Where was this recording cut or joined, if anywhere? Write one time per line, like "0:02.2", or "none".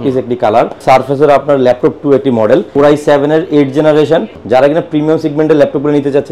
0:00.8
0:02.7
0:04.4